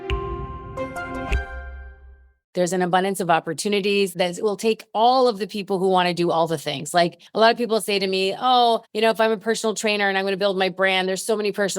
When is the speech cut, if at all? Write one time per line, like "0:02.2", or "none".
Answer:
0:02.4

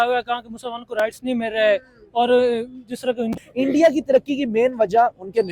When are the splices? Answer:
0:03.3

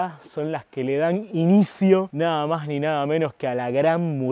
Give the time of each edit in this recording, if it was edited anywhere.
none

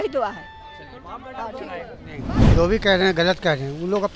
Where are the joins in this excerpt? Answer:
0:02.4

